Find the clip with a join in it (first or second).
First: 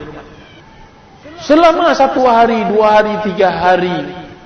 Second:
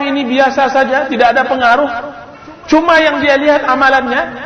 first